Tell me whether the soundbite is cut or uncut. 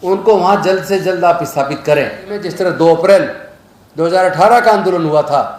cut